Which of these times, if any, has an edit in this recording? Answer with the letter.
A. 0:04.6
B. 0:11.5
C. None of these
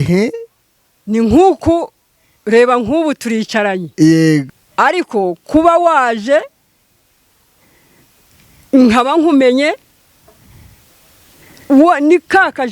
A